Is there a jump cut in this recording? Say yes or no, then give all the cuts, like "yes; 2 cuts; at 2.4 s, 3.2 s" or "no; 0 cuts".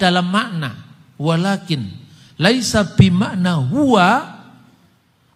no; 0 cuts